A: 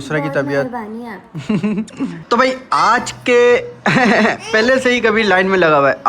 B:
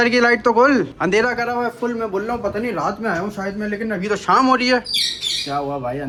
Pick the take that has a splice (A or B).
A